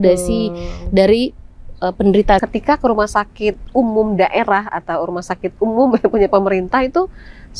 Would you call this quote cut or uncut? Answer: cut